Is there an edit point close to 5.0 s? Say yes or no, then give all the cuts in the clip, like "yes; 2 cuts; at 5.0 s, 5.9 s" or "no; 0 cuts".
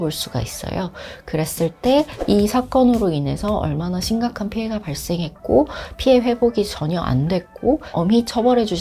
no; 1 cut; at 2.1 s